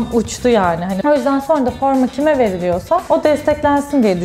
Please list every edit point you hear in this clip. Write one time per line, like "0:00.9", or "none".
0:00.9